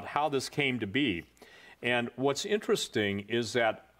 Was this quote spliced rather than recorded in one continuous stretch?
yes; 1 cut; at 2.0 s

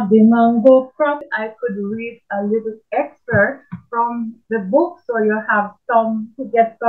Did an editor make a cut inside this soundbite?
yes; 1 cut; at 1.3 s

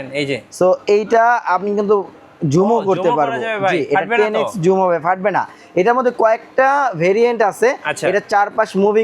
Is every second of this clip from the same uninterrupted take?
yes; 0 cuts

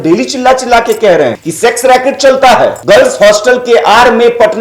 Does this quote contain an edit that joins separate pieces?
yes; 2 cuts; at 1.4 s, 2.8 s

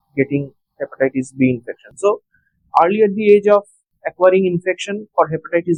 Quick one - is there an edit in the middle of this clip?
no; 0 cuts

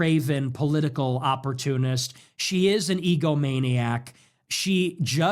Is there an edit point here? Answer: no; 0 cuts

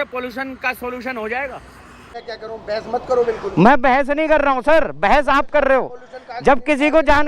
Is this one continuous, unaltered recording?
no; 1 cut; at 2.2 s

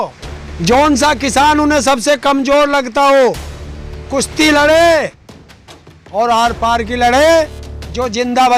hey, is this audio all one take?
yes; 0 cuts

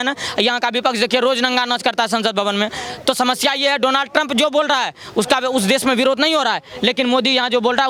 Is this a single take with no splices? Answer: yes; 0 cuts

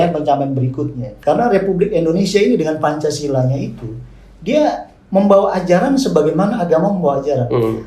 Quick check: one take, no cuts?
no; 1 cut; at 1.0 s

